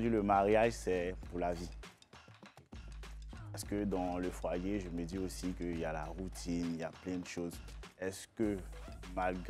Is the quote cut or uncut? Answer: uncut